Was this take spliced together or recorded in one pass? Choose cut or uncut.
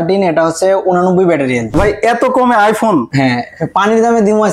cut